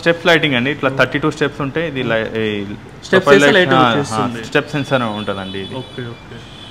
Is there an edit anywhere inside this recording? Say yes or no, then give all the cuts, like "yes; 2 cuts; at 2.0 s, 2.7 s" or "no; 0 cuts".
no; 0 cuts